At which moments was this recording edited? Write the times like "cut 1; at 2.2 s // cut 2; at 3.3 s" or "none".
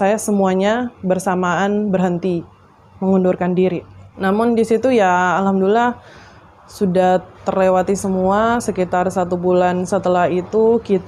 none